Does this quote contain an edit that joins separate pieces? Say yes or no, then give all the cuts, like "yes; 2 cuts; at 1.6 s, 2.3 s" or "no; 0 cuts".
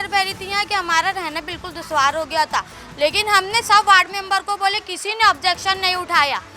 no; 0 cuts